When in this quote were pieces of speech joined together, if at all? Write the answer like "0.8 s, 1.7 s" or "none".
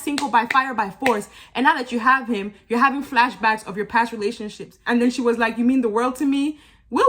4.8 s